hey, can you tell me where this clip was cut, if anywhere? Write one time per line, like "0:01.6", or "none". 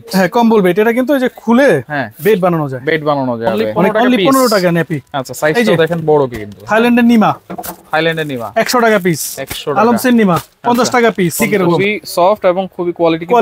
0:03.8
0:11.6